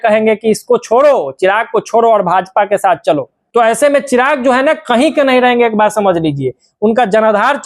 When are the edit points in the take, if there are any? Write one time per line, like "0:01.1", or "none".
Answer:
0:03.4